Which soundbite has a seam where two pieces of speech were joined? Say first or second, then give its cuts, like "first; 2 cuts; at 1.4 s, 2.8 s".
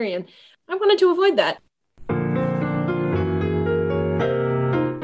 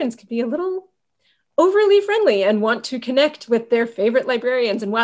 first; 1 cut; at 1.6 s